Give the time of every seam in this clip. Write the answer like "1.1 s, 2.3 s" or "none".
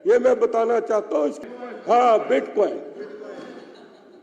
1.4 s